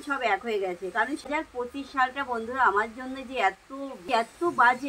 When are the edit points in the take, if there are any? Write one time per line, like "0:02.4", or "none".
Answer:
0:01.2
0:04.0